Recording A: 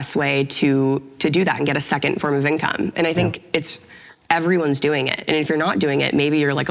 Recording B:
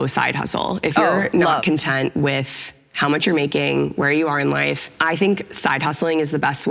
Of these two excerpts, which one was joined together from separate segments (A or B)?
B